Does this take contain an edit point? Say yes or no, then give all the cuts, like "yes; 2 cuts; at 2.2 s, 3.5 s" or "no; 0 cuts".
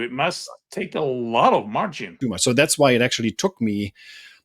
yes; 1 cut; at 2.0 s